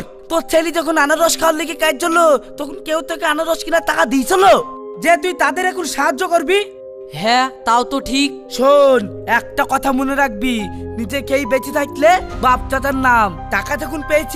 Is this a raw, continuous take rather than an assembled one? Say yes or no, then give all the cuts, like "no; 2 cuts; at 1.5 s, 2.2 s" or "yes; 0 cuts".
yes; 0 cuts